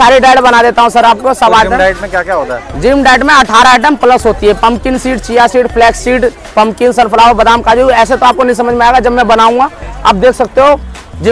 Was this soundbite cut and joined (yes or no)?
no